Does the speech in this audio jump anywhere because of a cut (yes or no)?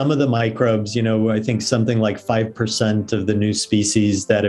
no